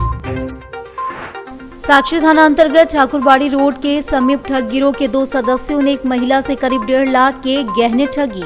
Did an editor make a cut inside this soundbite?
yes; 1 cut; at 1.5 s

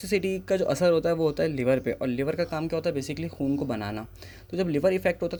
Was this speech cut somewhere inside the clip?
no; 0 cuts

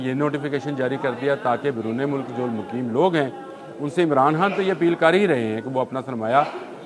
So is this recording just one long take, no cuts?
yes; 0 cuts

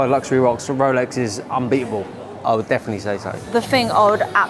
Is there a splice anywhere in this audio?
no; 0 cuts

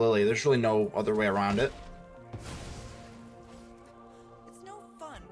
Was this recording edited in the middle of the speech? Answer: no; 0 cuts

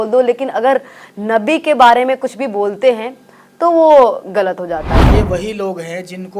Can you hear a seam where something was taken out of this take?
yes; 1 cut; at 5.0 s

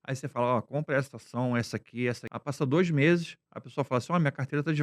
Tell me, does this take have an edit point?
yes; 1 cut; at 2.3 s

